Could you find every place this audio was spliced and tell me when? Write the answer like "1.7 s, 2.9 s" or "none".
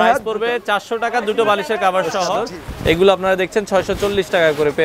2.4 s